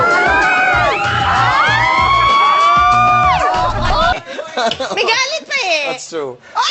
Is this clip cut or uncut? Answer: cut